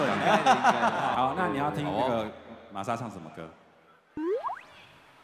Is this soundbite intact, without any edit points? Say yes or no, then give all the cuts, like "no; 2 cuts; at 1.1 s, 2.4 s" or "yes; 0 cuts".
no; 1 cut; at 1.0 s